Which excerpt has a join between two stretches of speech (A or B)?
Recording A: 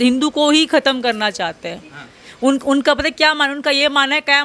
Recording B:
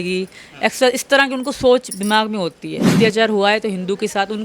B